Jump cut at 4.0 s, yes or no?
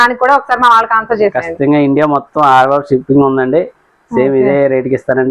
no